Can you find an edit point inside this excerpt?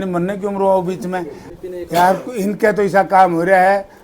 yes; 1 cut; at 1.4 s

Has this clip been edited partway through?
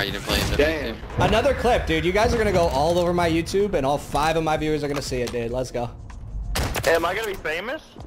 yes; 1 cut; at 1.0 s

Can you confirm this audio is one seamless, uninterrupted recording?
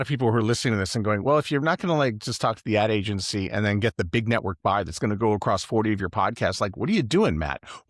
yes; 0 cuts

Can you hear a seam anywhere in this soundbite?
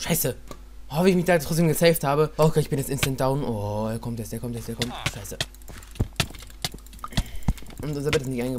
yes; 1 cut; at 2.3 s

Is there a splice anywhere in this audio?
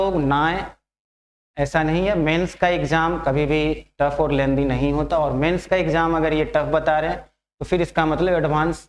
no; 0 cuts

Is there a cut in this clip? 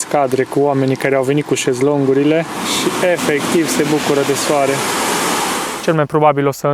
yes; 2 cuts; at 2.6 s, 5.7 s

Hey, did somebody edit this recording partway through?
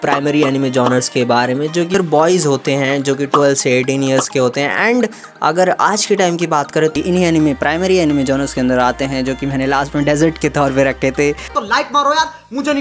yes; 3 cuts; at 1.9 s, 6.9 s, 11.5 s

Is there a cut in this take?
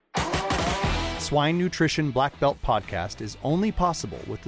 yes; 1 cut; at 1.1 s

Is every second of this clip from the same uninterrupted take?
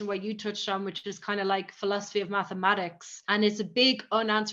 yes; 0 cuts

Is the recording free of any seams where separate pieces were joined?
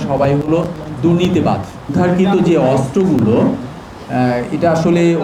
no; 1 cut; at 1.8 s

